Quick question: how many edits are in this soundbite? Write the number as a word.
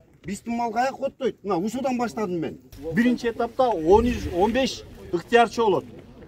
one